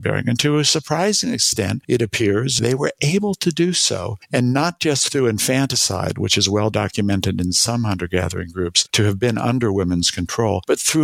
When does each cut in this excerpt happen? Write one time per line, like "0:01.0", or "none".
0:02.6
0:04.1
0:08.8